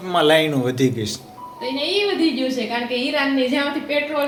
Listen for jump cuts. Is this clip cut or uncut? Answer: uncut